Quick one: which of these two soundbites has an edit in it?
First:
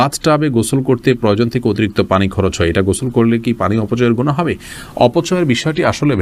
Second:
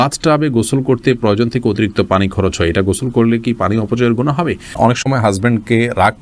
second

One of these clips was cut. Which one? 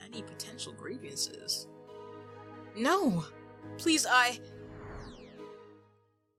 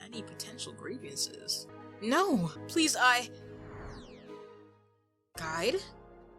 second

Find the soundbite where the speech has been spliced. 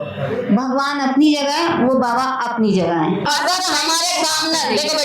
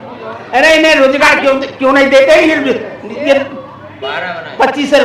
first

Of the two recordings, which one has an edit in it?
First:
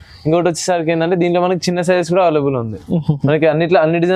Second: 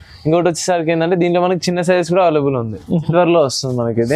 second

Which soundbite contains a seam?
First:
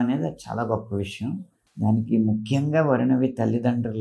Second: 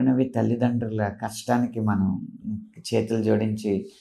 first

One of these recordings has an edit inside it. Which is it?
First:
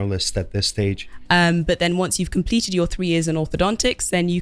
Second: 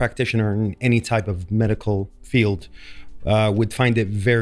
first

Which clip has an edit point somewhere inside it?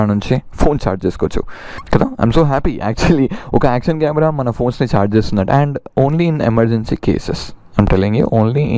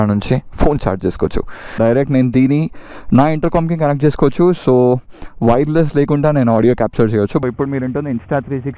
second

